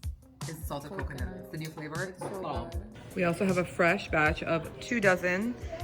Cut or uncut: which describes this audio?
cut